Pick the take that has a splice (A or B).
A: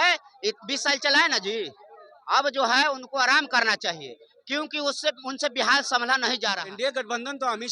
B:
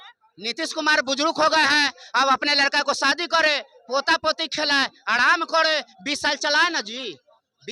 A